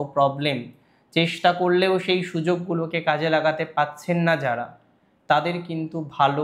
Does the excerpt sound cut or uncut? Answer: uncut